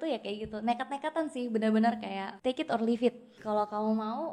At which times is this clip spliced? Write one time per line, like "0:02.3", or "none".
0:02.3
0:03.4